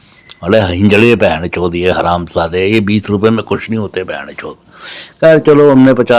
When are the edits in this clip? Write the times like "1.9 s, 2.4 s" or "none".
none